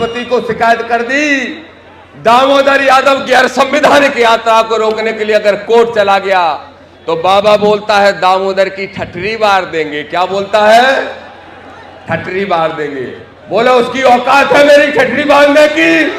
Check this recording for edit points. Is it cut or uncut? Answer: uncut